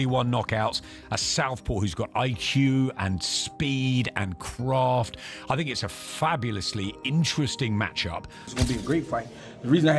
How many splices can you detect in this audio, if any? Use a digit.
1